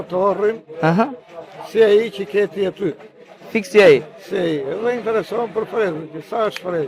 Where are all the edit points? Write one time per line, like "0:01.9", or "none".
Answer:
none